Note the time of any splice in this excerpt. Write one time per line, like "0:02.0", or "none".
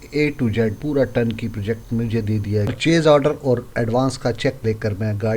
0:02.7

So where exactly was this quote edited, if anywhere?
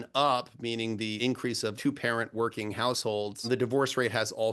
0:01.2
0:03.5

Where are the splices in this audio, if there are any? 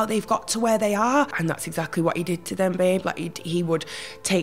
0:01.3

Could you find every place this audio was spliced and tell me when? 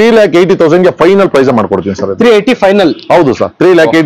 none

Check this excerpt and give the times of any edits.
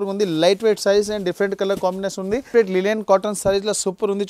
0:02.5

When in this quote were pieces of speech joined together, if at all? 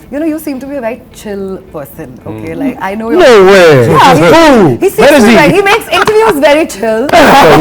none

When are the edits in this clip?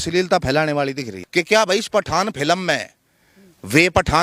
0:01.2

